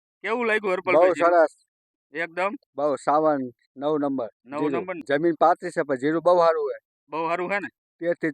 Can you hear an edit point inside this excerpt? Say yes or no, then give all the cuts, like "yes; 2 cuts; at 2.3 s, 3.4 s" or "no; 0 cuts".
yes; 1 cut; at 5.0 s